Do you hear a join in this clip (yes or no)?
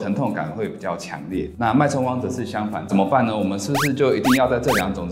yes